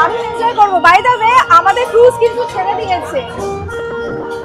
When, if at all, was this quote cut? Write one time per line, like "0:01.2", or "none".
0:03.3